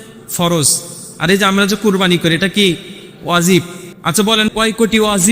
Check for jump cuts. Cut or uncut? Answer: cut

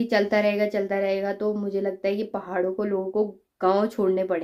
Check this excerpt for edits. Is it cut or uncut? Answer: uncut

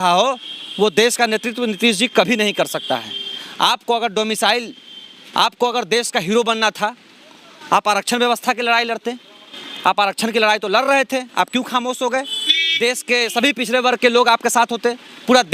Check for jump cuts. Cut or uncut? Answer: uncut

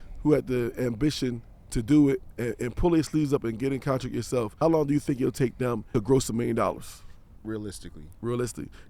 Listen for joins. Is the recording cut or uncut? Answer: cut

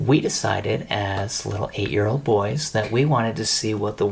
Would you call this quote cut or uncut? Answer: uncut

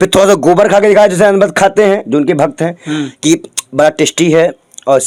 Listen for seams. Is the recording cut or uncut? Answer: uncut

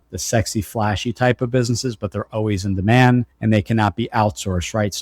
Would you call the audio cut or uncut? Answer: uncut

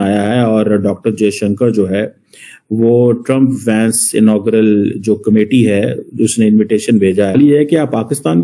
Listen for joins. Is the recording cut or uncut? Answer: cut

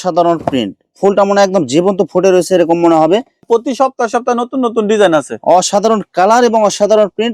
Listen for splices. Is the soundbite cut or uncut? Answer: cut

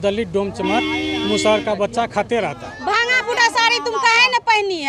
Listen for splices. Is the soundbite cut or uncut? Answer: cut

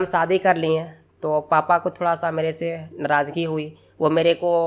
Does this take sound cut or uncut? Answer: uncut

